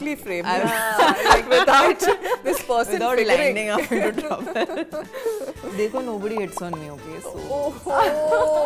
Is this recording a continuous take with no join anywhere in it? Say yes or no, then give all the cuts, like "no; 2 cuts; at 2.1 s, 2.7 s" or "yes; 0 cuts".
yes; 0 cuts